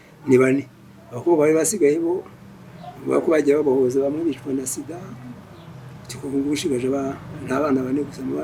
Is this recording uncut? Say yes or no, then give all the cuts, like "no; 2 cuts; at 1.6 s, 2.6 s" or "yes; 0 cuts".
yes; 0 cuts